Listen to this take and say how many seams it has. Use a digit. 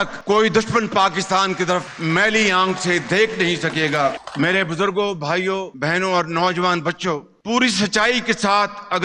0